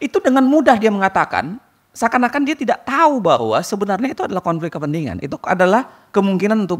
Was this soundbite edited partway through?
no; 0 cuts

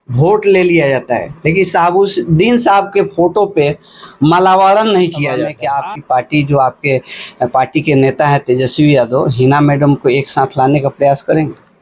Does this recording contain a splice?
yes; 1 cut; at 5.6 s

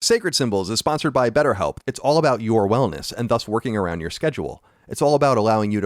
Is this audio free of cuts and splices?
no; 1 cut; at 1.8 s

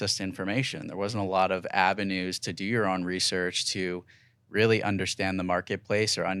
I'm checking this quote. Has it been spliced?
no; 0 cuts

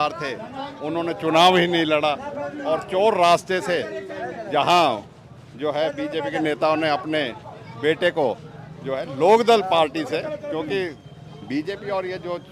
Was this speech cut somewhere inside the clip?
no; 0 cuts

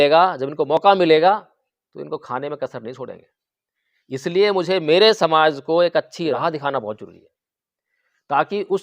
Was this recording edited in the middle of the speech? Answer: yes; 1 cut; at 6.3 s

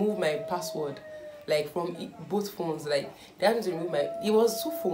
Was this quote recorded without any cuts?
yes; 0 cuts

